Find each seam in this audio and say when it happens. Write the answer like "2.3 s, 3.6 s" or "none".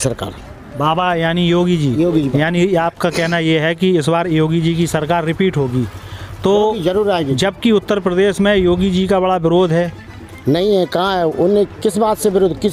none